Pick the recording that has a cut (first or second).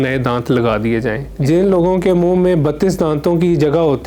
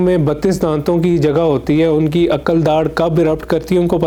first